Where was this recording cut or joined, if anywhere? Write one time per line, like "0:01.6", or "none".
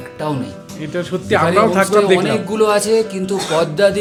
none